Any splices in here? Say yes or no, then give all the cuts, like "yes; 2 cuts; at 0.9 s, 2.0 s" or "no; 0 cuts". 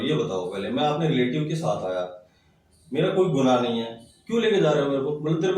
no; 0 cuts